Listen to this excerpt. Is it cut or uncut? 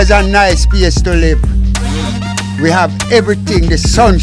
uncut